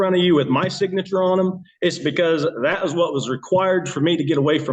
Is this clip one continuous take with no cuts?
yes; 0 cuts

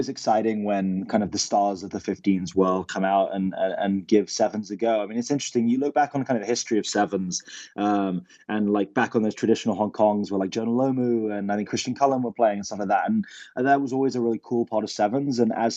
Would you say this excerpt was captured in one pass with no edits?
yes; 0 cuts

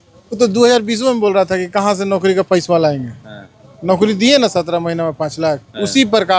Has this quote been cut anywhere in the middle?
no; 0 cuts

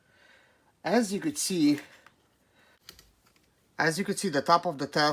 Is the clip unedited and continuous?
no; 1 cut; at 2.8 s

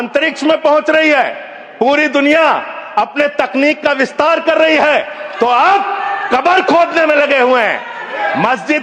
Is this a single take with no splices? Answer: yes; 0 cuts

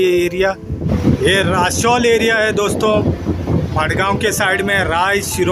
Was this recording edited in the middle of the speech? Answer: yes; 1 cut; at 0.9 s

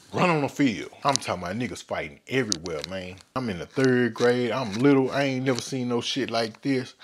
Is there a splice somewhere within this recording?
yes; 2 cuts; at 0.9 s, 3.4 s

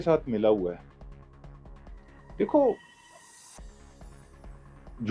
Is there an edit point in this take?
no; 0 cuts

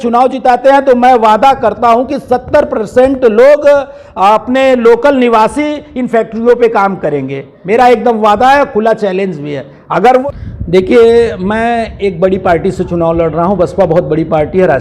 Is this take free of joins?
no; 1 cut; at 10.2 s

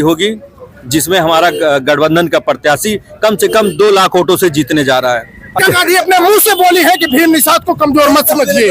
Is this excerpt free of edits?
no; 1 cut; at 5.6 s

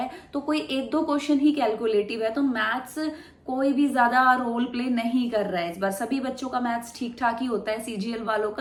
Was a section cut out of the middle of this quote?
no; 0 cuts

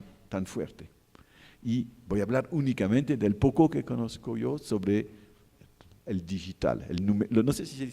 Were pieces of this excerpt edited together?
yes; 1 cut; at 4.4 s

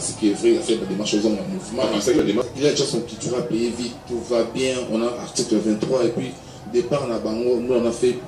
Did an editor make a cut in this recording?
yes; 1 cut; at 2.2 s

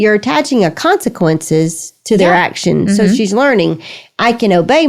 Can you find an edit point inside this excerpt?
no; 0 cuts

